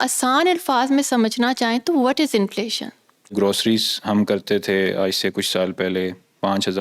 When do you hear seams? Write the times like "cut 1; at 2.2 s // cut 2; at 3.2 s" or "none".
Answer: cut 1; at 3.3 s